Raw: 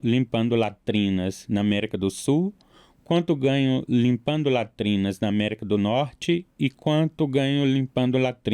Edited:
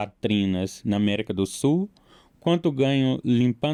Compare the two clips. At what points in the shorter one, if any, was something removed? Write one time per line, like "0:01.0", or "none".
none